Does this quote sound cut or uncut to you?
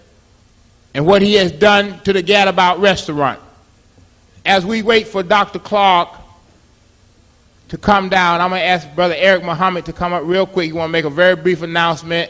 uncut